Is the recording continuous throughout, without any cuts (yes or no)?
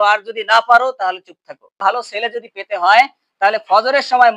no